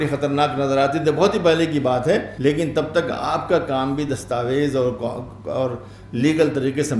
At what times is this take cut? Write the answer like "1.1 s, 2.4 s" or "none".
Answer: 2.3 s